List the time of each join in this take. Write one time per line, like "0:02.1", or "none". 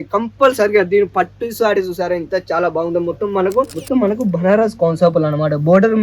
0:03.8